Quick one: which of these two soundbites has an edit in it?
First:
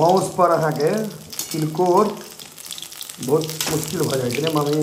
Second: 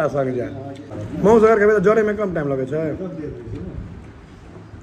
second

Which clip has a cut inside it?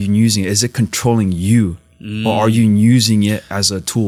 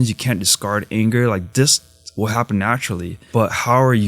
second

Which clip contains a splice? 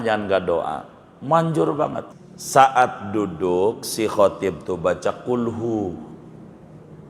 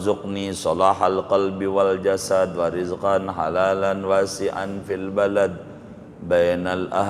first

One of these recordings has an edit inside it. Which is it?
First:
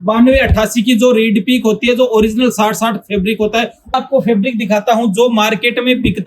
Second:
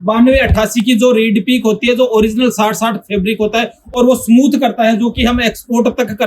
first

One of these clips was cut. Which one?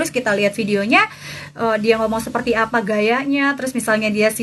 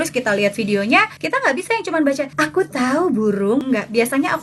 second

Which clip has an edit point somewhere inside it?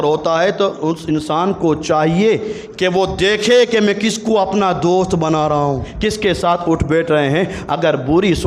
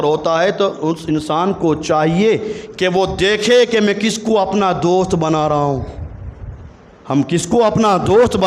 first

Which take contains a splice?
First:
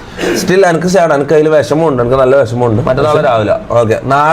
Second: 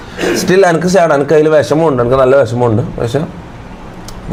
first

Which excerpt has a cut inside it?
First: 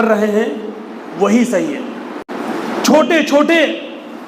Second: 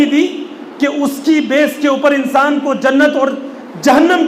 first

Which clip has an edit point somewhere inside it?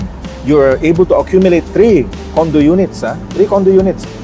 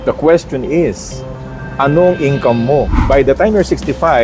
second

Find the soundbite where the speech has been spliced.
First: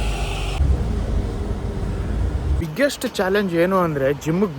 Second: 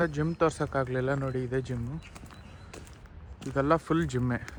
first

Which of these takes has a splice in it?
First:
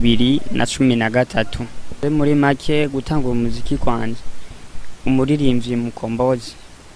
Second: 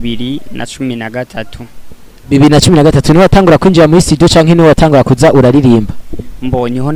first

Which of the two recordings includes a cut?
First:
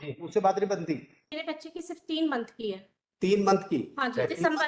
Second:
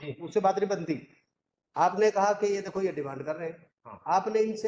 first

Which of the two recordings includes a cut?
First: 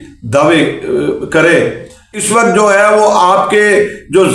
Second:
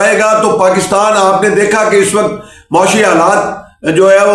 first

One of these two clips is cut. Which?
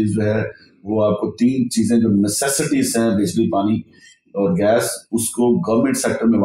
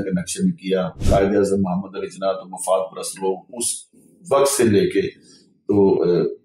second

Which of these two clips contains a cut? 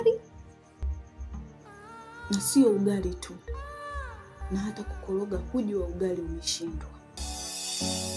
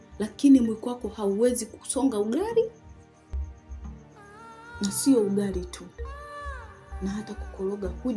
first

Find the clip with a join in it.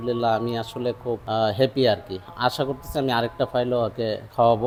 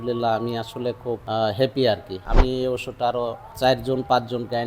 second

